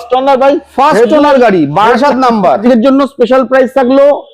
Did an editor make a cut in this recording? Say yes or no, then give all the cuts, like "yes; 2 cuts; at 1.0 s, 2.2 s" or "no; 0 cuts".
yes; 1 cut; at 2.6 s